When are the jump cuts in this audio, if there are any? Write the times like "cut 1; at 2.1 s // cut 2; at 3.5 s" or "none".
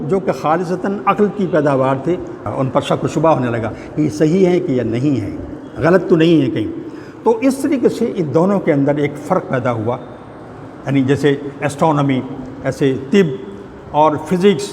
cut 1; at 2.4 s